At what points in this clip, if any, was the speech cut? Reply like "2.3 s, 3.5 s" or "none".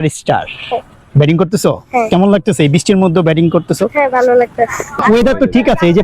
5.0 s